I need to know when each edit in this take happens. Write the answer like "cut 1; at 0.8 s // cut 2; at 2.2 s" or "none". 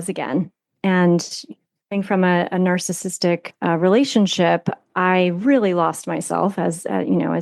cut 1; at 3.5 s